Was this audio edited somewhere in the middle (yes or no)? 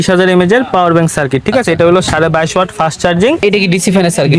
yes